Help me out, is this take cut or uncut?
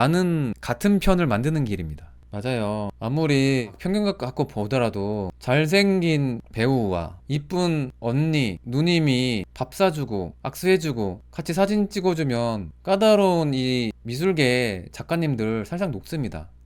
uncut